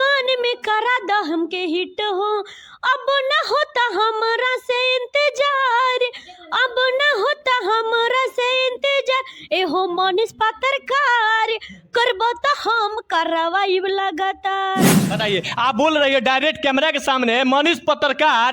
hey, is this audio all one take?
no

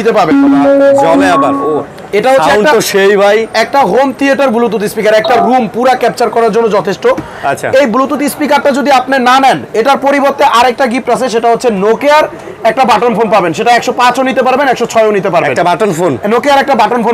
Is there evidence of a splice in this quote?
no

